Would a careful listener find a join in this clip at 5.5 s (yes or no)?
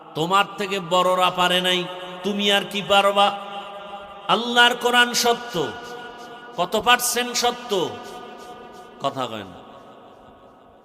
no